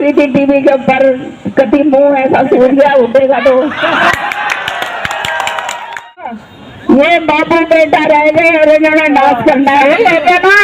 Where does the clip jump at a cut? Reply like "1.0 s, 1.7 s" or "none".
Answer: 6.4 s